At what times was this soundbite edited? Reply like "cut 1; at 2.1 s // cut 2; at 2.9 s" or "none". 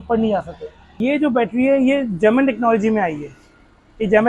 cut 1; at 1.0 s